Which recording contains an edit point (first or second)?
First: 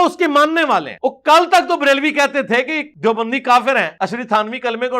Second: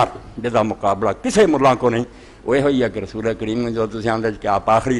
first